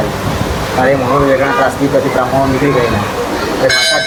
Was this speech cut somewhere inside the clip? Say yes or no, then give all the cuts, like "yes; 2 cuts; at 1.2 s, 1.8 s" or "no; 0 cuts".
no; 0 cuts